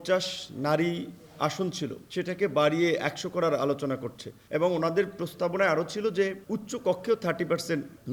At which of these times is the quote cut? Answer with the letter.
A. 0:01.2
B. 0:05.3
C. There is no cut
C